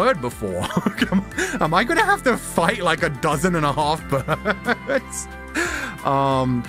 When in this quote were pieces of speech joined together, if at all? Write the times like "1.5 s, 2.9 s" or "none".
none